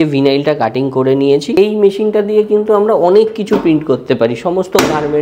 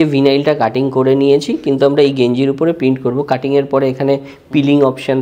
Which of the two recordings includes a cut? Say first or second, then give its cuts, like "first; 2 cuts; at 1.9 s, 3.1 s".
first; 1 cut; at 1.6 s